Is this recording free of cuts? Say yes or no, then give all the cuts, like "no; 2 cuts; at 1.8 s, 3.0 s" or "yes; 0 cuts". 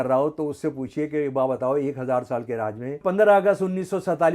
no; 1 cut; at 3.0 s